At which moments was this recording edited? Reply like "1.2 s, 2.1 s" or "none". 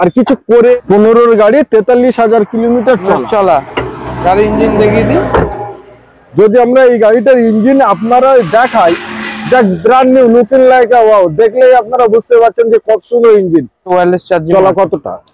0.8 s, 13.9 s